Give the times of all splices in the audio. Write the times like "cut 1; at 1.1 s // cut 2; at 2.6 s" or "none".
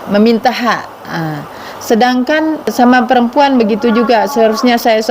cut 1; at 2.7 s